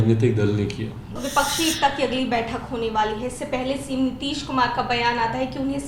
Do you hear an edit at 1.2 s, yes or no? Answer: yes